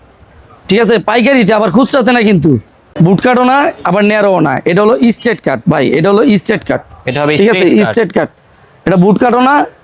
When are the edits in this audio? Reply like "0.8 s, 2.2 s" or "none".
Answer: 2.8 s